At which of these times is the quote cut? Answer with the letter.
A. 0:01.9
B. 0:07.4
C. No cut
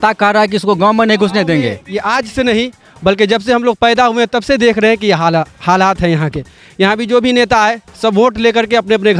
A